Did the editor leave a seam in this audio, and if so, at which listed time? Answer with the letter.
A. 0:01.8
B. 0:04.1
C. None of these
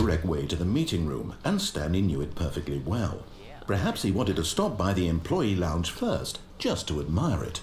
C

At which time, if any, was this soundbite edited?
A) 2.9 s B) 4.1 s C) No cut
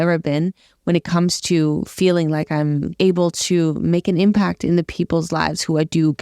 A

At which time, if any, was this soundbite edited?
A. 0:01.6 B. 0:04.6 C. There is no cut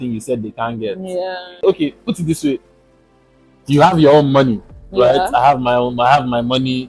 A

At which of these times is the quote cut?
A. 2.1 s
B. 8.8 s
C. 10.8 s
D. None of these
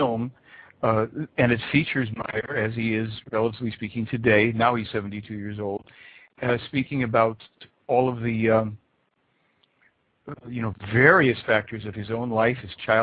A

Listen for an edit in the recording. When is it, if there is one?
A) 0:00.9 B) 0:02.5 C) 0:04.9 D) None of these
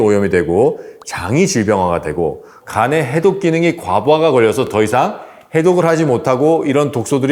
B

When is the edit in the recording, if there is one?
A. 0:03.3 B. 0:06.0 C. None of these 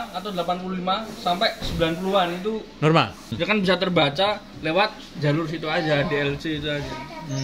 A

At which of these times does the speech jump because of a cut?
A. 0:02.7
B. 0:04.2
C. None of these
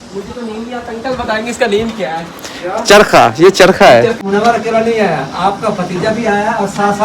B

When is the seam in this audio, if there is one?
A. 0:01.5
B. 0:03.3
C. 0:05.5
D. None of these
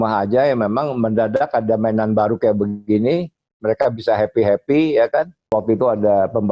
C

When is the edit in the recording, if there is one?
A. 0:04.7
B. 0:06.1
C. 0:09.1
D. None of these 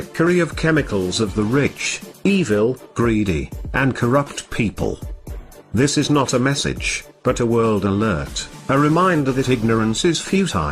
B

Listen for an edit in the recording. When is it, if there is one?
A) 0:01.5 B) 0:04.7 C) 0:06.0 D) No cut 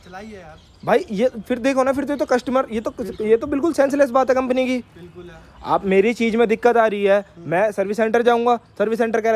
D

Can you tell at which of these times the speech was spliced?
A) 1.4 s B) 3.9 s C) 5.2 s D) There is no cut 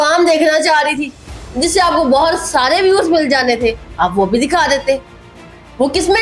D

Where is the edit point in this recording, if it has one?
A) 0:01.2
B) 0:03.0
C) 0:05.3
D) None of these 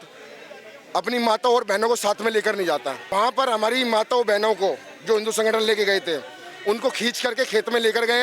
B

